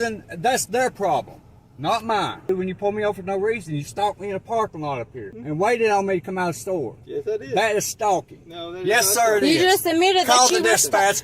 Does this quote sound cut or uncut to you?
cut